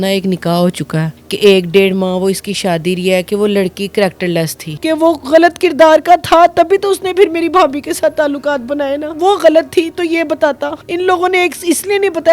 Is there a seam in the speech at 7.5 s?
no; 4 cuts; at 1.1 s, 4.6 s, 9.1 s, 10.8 s

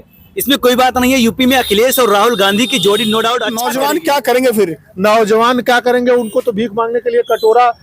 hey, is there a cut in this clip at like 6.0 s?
no; 1 cut; at 3.6 s

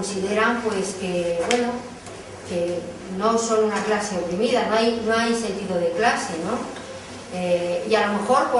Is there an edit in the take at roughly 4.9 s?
no; 1 cut; at 6.2 s

